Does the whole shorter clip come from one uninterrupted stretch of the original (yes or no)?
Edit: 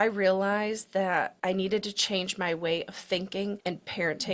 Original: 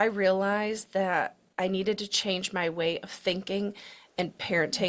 no